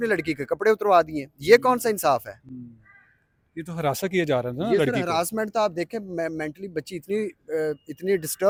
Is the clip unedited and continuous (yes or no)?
yes